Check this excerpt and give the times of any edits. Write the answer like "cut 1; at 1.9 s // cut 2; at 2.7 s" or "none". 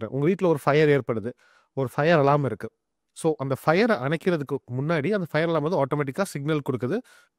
none

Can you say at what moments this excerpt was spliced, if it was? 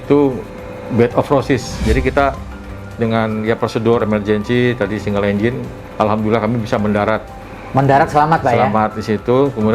cut 1; at 1.8 s

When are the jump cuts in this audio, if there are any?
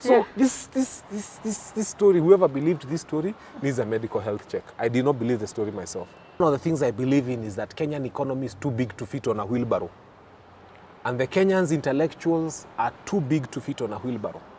cut 1; at 6.4 s

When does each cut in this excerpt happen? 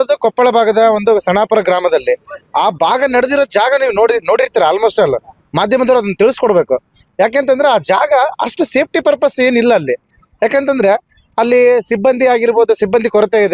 none

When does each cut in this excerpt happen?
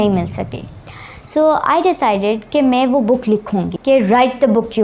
cut 1; at 3.7 s

